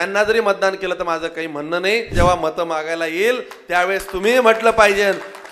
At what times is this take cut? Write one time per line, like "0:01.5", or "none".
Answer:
0:02.1